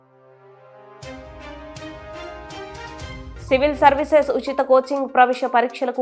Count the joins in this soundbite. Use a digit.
0